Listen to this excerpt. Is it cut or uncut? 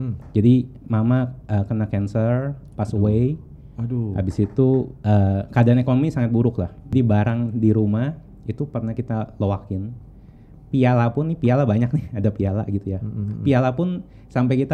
cut